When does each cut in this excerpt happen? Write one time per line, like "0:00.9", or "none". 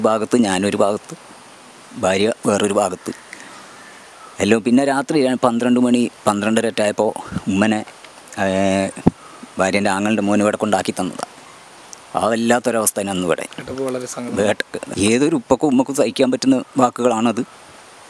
none